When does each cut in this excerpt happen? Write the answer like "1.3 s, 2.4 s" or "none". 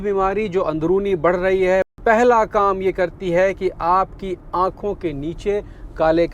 1.9 s

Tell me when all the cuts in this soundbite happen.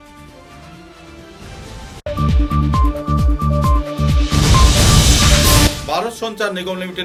none

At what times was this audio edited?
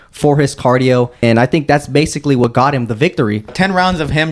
1.2 s, 2.4 s, 3.5 s

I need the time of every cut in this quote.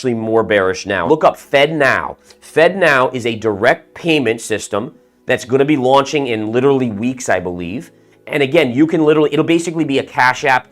1.0 s

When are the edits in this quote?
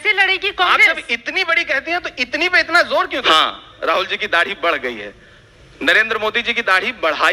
3.2 s

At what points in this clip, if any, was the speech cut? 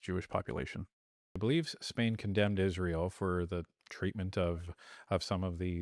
1.4 s

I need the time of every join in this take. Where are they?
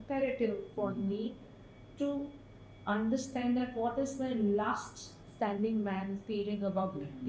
none

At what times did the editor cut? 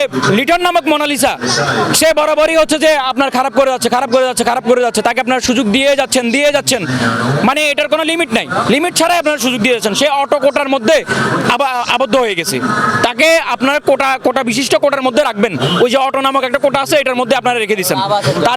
none

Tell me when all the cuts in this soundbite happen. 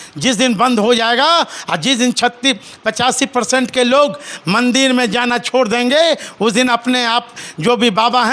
none

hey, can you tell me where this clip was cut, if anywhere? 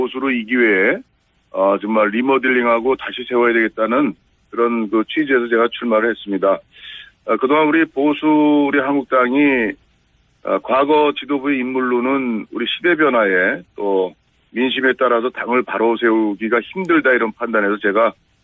16.2 s

